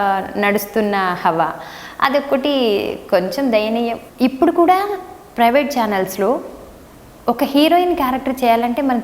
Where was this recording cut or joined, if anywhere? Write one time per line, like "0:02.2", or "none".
0:04.0